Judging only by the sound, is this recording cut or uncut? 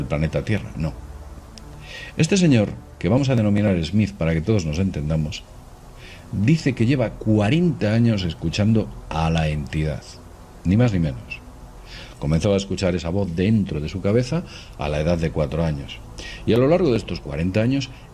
cut